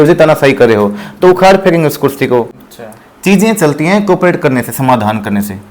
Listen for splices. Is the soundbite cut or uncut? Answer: cut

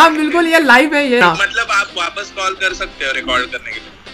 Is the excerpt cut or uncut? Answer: cut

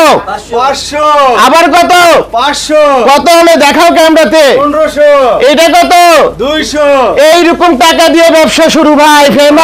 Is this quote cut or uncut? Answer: uncut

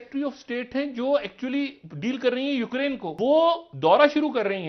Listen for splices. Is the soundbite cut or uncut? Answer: cut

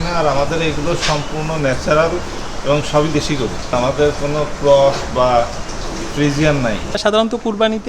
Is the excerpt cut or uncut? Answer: cut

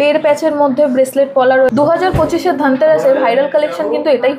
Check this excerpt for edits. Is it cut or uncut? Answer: cut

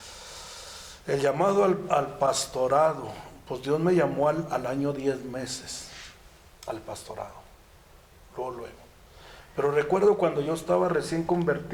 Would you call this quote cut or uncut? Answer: uncut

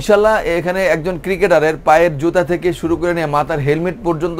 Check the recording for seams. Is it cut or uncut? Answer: uncut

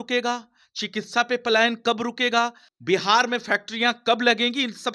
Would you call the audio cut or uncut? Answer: cut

